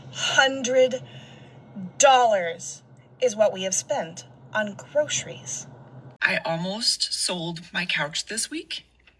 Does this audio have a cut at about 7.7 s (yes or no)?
no